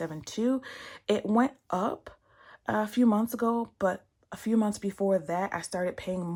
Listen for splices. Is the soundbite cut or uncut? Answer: uncut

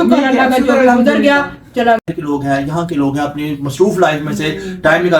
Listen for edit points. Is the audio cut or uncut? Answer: cut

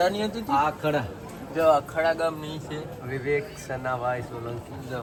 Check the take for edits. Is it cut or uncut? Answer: uncut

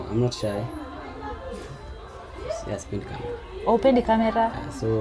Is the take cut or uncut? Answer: uncut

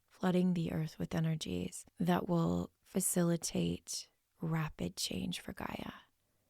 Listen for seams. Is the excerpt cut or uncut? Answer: cut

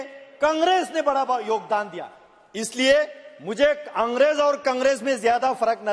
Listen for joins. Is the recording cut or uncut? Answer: uncut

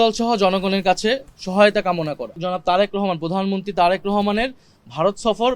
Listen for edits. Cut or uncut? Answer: cut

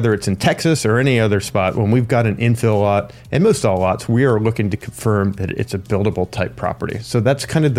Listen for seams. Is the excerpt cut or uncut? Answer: uncut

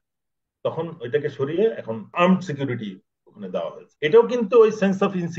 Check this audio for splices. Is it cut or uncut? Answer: cut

